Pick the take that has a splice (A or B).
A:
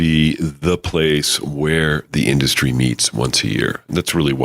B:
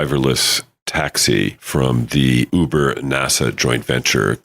B